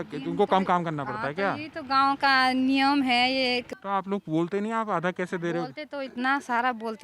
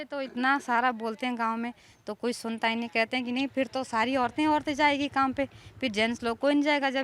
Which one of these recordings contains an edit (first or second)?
first